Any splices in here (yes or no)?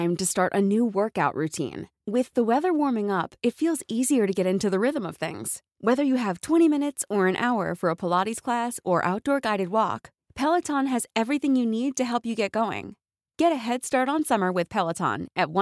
no